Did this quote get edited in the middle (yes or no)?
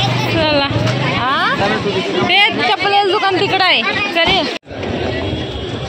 no